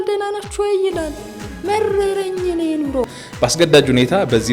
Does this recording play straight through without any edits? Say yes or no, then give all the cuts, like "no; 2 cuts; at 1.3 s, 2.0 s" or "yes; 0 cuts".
no; 1 cut; at 3.1 s